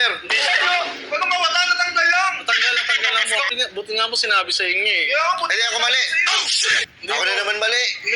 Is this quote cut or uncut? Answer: cut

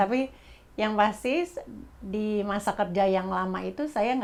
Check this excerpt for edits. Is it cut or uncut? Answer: uncut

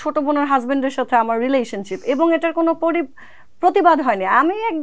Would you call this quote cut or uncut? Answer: uncut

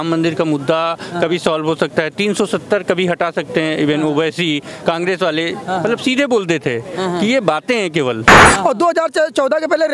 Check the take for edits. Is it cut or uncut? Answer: cut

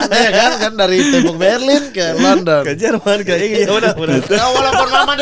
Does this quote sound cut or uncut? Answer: cut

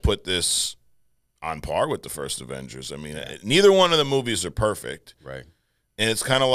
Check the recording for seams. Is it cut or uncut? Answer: uncut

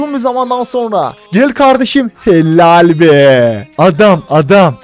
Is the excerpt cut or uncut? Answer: cut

